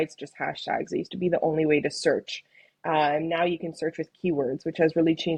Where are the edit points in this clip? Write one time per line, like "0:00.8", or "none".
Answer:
none